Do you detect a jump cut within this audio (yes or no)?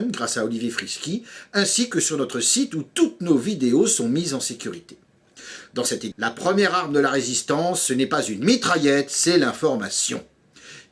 no